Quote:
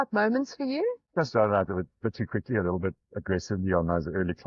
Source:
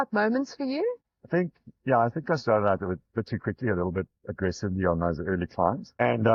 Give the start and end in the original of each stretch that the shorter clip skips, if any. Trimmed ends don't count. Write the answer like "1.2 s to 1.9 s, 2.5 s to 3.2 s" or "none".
1.1 s to 2.2 s